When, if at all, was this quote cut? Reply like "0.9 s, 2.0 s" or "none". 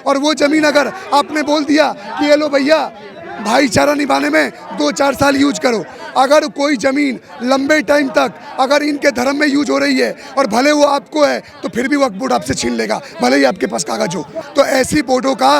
14.4 s